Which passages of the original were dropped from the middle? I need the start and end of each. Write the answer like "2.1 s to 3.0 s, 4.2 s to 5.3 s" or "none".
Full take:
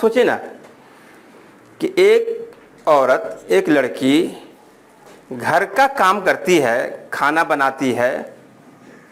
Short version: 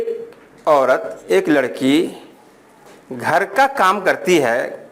none